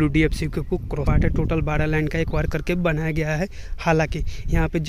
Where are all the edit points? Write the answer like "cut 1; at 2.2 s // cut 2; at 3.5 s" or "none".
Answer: cut 1; at 1.1 s